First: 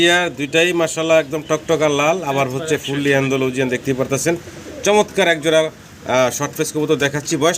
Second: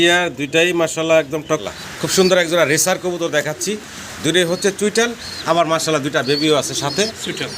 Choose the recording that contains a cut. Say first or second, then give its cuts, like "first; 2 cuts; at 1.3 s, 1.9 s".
second; 1 cut; at 1.6 s